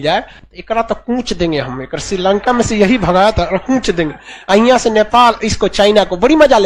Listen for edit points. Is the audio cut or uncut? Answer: uncut